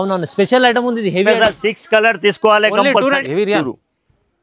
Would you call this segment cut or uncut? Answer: cut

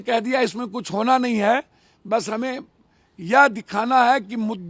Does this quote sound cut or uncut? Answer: uncut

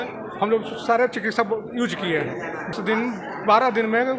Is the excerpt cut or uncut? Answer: cut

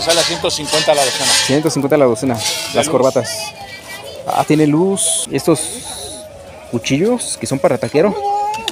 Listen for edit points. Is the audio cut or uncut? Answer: cut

